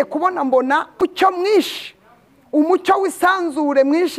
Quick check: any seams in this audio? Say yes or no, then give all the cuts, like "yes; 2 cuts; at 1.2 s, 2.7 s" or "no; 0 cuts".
yes; 1 cut; at 0.9 s